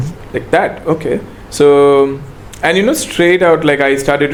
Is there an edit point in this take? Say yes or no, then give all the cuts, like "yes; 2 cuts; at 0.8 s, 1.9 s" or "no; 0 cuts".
no; 0 cuts